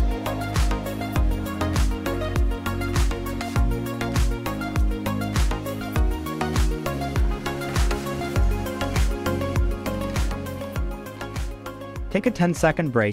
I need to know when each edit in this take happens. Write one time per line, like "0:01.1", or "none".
0:12.1